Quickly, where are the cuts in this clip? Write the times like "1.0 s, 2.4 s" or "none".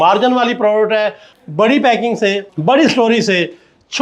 1.3 s, 2.5 s